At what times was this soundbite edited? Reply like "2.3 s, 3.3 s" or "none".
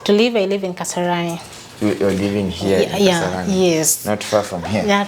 none

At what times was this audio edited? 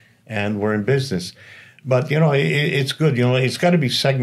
none

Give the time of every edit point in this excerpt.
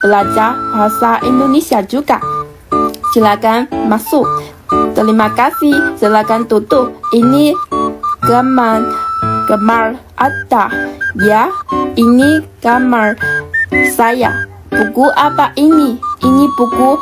none

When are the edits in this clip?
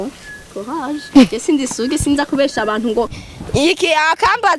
3.2 s

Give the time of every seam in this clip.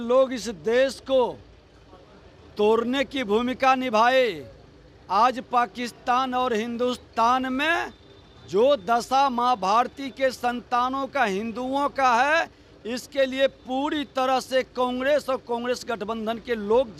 none

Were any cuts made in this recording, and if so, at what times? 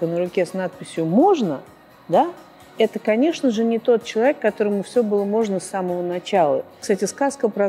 6.8 s

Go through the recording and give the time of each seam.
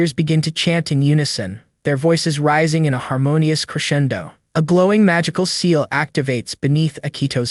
none

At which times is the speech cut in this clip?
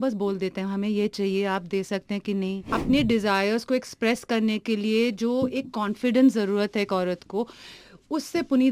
2.6 s

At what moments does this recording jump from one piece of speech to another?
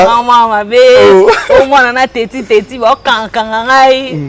none

